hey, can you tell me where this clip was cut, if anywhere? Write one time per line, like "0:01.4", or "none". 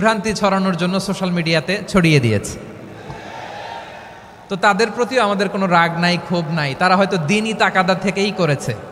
none